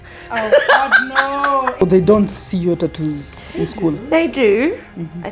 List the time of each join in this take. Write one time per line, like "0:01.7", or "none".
0:01.8